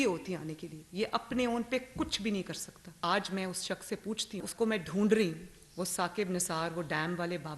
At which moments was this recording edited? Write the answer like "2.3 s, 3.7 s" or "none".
3.0 s, 4.4 s